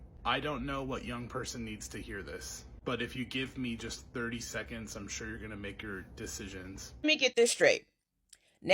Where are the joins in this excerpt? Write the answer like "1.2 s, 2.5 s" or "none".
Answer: 6.9 s